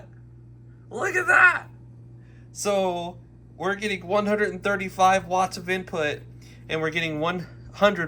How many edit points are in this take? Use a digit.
0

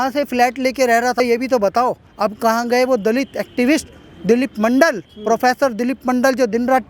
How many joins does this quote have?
2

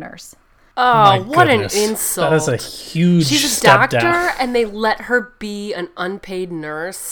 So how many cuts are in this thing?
0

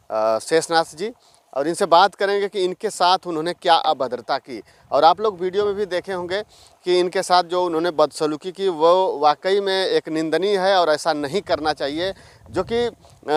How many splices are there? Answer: 0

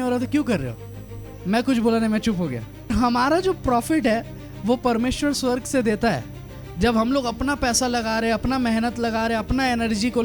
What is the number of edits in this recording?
1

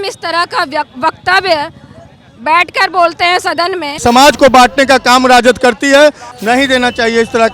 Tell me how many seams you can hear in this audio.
2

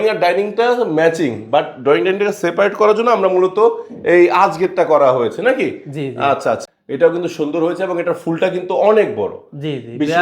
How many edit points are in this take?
1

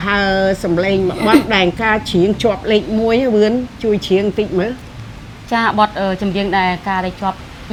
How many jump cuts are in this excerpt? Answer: 0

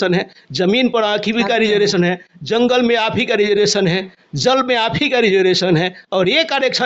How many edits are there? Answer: 0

